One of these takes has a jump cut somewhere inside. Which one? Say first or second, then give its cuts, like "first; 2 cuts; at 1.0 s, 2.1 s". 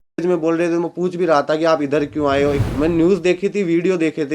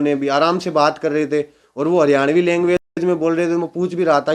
first; 1 cut; at 2.6 s